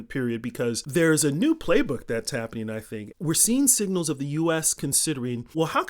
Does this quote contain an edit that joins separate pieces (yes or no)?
yes